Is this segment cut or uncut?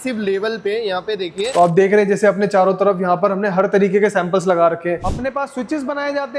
cut